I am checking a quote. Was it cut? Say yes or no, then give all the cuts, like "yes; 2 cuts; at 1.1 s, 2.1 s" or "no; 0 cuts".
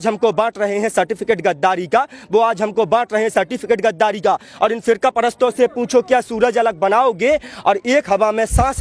yes; 1 cut; at 4.5 s